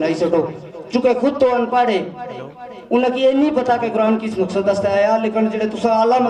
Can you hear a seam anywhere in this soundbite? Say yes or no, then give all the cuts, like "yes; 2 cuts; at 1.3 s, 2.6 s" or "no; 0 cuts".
no; 0 cuts